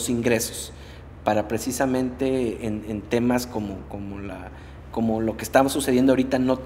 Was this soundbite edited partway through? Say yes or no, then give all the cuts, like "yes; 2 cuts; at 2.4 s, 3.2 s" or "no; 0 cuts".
no; 0 cuts